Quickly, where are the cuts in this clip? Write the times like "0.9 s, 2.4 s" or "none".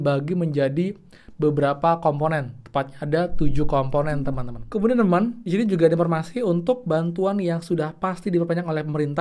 4.5 s